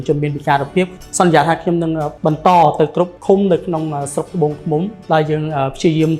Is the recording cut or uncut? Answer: cut